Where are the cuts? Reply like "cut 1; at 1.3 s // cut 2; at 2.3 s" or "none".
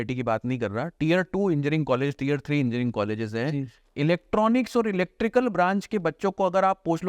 none